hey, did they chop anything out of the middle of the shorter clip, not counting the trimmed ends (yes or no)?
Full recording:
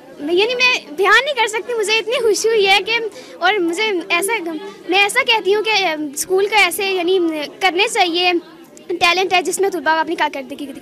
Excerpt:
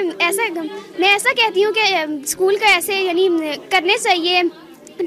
no